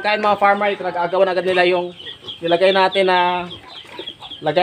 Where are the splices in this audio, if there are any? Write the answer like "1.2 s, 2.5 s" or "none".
none